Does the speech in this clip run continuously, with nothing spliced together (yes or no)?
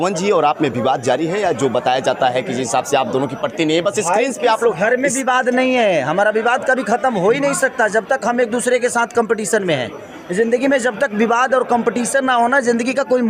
yes